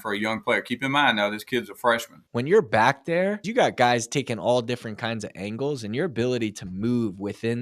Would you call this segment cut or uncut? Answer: cut